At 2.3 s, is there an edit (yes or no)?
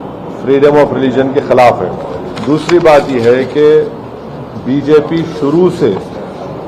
yes